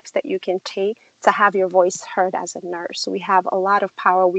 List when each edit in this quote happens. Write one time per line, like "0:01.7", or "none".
0:01.1

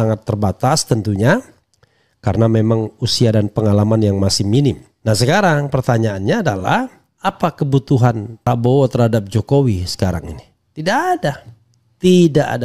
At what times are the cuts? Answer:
0:04.9
0:07.0
0:08.5

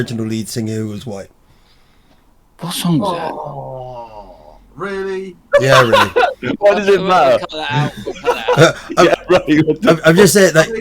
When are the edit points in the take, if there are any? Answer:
none

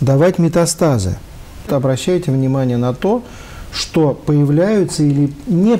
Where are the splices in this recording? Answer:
0:01.7

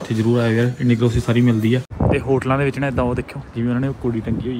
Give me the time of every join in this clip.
0:01.9

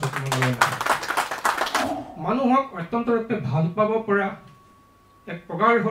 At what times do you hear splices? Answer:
0:01.9

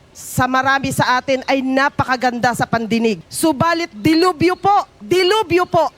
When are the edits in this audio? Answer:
0:03.3
0:05.0

